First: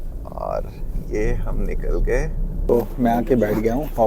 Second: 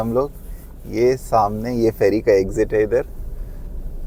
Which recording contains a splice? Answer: first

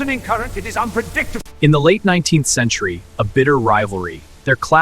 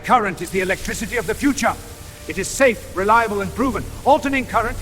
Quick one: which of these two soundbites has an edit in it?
first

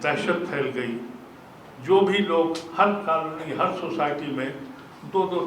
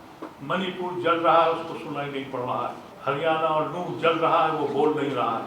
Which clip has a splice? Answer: second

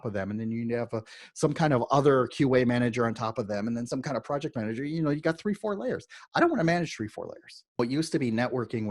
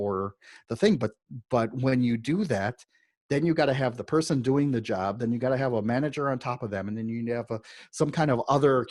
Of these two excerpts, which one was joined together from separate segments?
first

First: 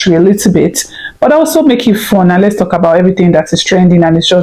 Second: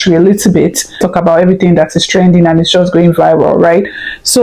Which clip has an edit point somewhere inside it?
second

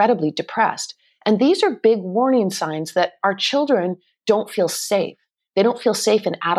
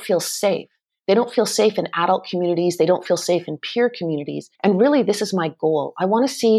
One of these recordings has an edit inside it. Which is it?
second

